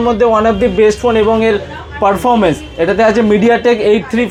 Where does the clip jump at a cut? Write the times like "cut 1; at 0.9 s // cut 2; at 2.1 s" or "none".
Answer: none